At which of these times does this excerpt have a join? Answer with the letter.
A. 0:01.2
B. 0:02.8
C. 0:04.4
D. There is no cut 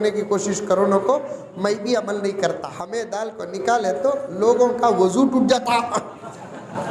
B